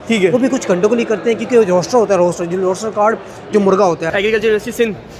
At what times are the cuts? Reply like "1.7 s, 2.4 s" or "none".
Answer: 4.1 s